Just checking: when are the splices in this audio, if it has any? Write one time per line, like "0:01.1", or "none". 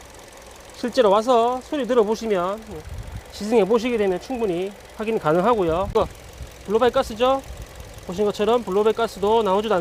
0:05.9